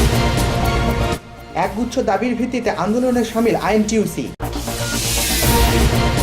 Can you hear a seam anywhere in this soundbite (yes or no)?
no